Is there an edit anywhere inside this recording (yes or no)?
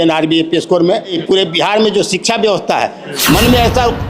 yes